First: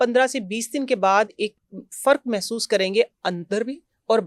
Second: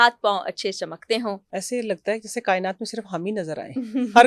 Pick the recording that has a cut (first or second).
second